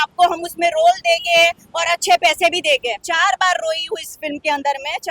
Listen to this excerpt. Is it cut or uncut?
cut